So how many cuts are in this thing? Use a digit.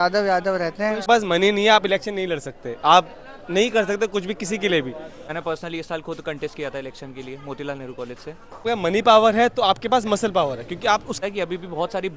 4